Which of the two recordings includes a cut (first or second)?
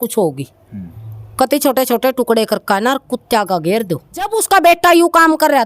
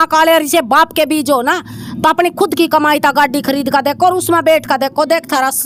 first